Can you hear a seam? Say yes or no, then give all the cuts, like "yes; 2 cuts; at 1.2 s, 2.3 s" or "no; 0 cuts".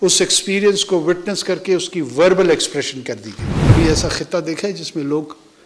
yes; 1 cut; at 3.7 s